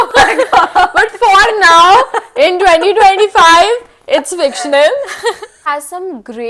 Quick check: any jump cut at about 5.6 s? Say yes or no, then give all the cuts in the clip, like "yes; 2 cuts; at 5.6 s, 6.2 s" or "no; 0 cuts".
yes; 1 cut; at 5.6 s